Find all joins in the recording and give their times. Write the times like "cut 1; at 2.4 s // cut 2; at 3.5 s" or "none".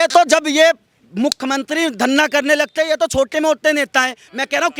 none